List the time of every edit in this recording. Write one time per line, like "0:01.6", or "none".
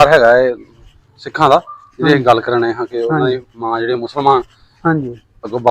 none